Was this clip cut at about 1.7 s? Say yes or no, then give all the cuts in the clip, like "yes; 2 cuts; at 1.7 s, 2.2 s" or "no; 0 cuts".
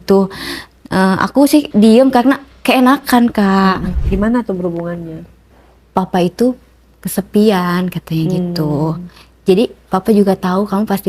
yes; 2 cuts; at 1.7 s, 3.9 s